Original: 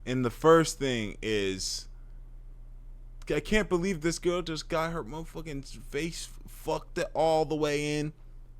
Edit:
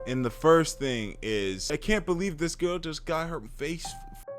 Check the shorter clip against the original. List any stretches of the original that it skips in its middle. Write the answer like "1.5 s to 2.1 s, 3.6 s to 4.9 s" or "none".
1.7 s to 3.3 s, 5.1 s to 5.8 s